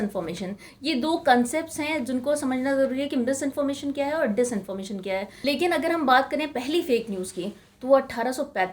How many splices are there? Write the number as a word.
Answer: one